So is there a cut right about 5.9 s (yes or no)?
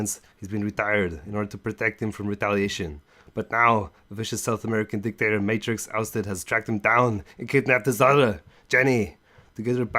no